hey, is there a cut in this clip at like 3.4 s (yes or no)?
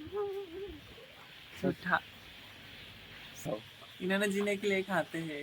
yes